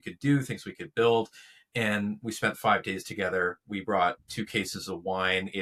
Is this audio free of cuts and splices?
yes; 0 cuts

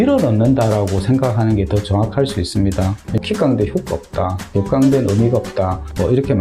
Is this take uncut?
no; 1 cut; at 3.1 s

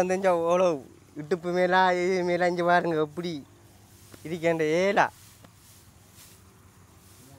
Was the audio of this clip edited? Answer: no; 0 cuts

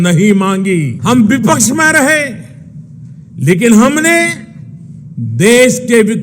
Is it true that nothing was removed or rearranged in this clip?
no; 1 cut; at 0.9 s

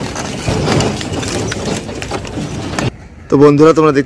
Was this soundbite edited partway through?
no; 0 cuts

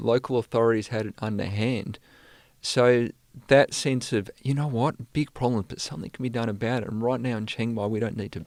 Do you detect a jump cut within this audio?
no; 0 cuts

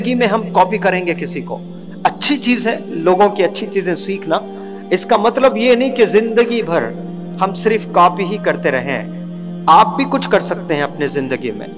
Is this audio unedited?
yes; 0 cuts

